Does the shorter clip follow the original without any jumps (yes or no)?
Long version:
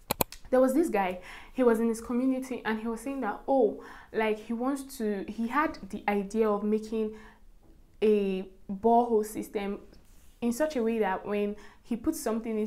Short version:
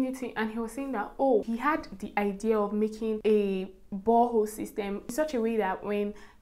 no